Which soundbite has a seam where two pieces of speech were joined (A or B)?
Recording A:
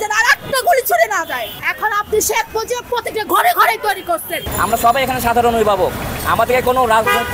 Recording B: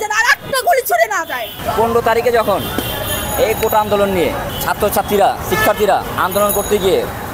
A